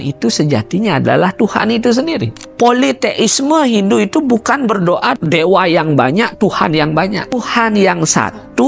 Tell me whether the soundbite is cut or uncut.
cut